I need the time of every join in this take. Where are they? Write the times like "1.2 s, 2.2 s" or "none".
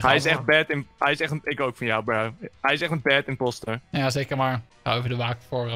4.7 s